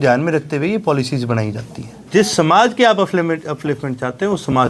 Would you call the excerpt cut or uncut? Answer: cut